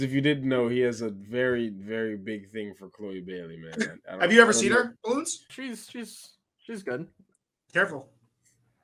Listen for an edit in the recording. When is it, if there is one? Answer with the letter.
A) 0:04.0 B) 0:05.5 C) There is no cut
B